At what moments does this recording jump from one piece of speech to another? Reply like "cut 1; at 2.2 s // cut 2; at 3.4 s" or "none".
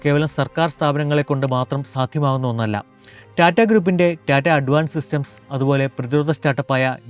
none